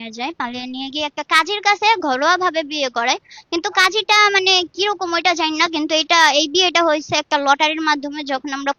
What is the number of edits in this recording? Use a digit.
0